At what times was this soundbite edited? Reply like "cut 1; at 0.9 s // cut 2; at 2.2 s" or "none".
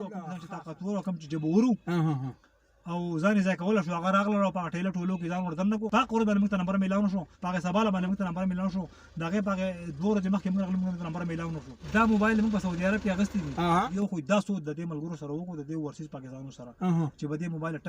cut 1; at 5.9 s // cut 2; at 7.3 s // cut 3; at 11.7 s // cut 4; at 13.9 s